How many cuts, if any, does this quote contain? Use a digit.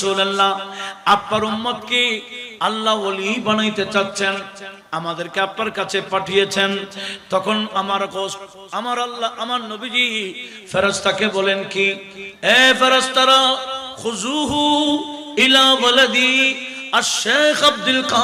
0